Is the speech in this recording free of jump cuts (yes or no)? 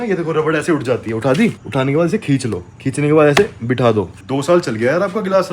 no